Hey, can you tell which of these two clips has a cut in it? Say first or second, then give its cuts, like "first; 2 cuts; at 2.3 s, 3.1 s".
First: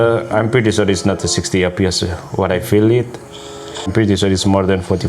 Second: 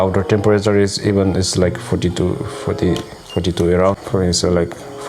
first; 1 cut; at 3.9 s